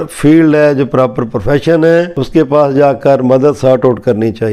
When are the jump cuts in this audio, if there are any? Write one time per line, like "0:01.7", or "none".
0:02.2